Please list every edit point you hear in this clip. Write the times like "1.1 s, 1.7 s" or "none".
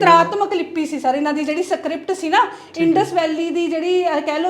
none